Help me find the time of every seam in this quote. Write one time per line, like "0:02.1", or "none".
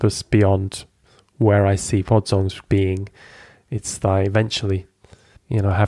none